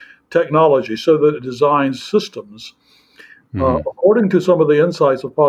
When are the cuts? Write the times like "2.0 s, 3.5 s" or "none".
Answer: none